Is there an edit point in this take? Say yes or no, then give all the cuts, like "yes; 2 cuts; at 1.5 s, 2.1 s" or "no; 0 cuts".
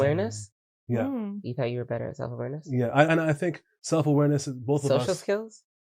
no; 0 cuts